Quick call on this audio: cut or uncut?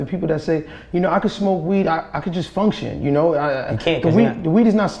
uncut